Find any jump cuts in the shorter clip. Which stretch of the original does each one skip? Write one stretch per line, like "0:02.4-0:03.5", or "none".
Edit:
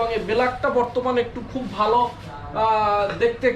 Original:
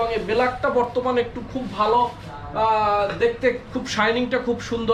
none